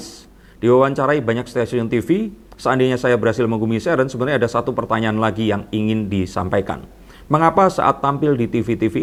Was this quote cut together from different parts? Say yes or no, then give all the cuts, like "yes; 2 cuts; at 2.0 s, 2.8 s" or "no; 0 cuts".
no; 0 cuts